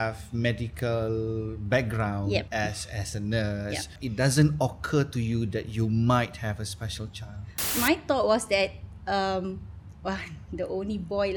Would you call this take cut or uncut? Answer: cut